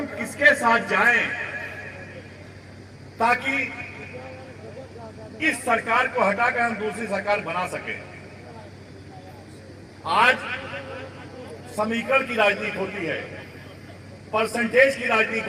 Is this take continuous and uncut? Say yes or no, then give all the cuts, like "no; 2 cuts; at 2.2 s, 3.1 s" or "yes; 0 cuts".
yes; 0 cuts